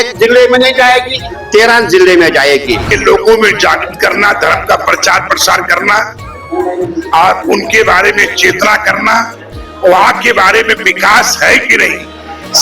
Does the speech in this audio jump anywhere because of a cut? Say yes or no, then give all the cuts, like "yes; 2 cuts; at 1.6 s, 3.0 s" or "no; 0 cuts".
yes; 1 cut; at 2.8 s